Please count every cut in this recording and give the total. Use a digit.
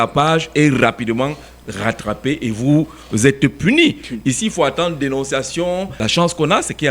1